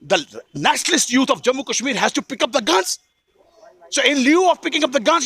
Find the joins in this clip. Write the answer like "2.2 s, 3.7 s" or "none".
none